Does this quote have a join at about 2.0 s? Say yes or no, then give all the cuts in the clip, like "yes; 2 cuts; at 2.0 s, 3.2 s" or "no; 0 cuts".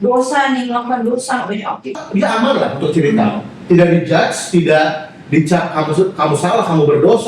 yes; 1 cut; at 2.0 s